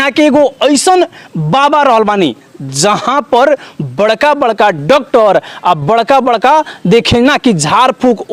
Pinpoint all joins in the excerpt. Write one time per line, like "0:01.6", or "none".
none